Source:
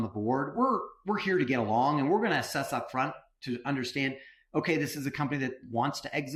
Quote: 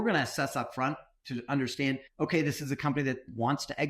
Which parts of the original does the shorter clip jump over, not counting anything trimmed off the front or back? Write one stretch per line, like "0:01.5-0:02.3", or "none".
0:04.2-0:04.4